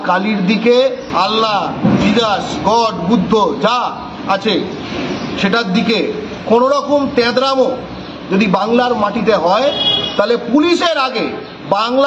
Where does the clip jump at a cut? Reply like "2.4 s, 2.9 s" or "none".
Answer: 1.0 s